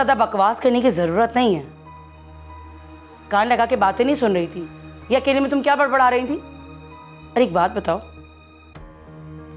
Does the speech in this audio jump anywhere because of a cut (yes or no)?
no